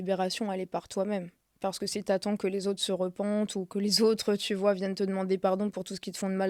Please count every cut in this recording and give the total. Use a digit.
0